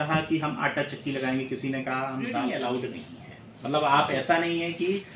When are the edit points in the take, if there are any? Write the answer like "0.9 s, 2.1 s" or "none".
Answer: 2.3 s

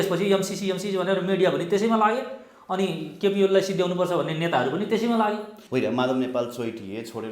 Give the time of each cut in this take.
5.5 s

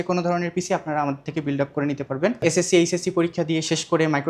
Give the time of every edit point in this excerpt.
2.4 s

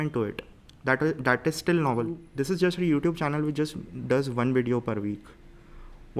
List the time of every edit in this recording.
2.2 s

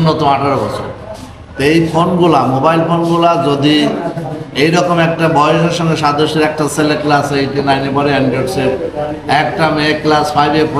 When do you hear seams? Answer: none

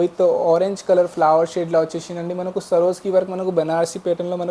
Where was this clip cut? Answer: none

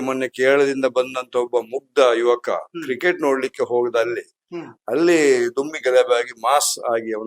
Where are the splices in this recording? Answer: none

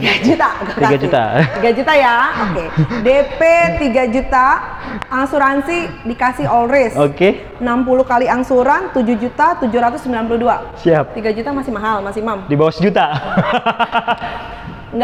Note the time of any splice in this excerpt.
none

